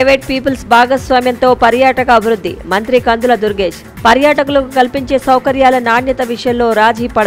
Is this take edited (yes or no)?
no